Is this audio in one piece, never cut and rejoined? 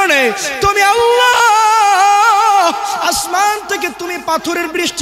yes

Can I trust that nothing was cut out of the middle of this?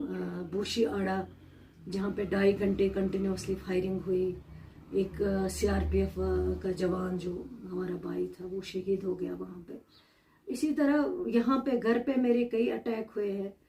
yes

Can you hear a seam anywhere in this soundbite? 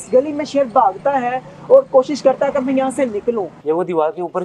yes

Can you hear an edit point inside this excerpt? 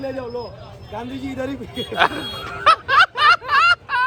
no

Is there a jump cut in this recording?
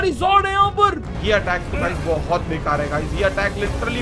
yes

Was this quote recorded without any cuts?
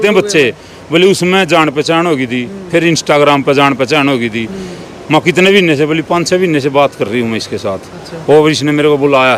yes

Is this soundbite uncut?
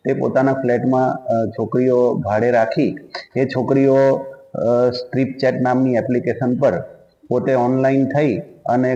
yes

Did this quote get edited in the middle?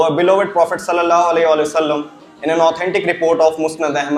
no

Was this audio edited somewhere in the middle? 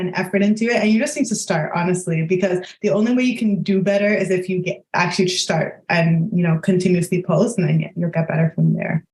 no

